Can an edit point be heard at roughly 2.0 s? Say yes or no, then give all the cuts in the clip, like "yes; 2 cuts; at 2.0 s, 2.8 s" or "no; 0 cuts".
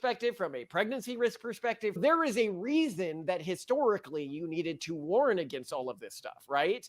yes; 1 cut; at 2.0 s